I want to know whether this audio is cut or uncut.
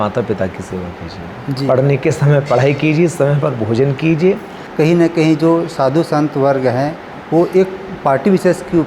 cut